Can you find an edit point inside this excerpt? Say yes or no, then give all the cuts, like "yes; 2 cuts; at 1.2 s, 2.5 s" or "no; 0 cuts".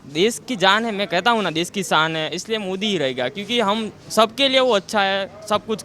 no; 0 cuts